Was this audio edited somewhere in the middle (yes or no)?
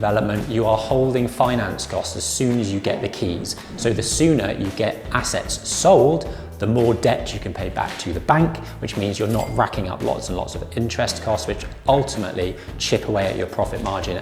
no